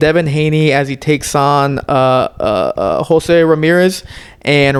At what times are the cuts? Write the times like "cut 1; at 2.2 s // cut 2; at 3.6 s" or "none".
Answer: none